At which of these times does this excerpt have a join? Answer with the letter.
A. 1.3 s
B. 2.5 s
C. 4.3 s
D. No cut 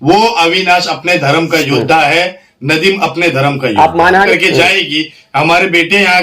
C